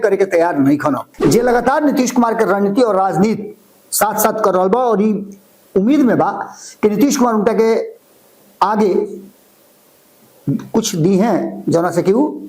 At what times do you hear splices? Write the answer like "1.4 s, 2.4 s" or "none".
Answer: 1.1 s